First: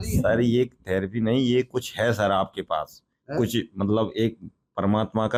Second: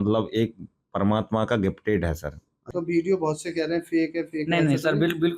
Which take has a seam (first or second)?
second